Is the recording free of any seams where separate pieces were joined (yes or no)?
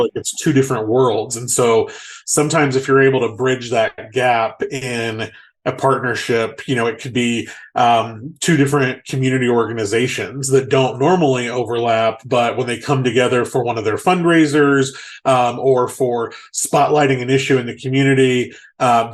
yes